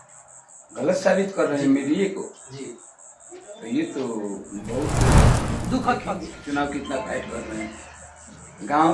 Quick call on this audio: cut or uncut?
cut